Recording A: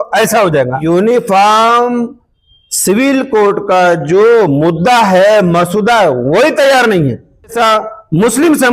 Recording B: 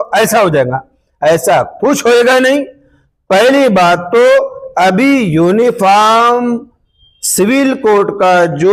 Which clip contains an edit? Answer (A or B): A